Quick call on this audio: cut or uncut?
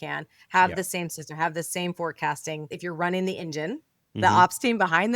cut